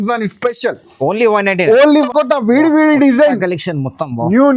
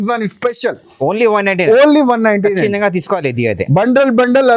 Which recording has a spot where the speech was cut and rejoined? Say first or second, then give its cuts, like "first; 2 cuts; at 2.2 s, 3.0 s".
first; 1 cut; at 2.1 s